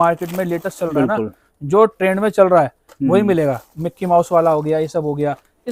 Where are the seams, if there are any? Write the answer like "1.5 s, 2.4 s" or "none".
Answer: none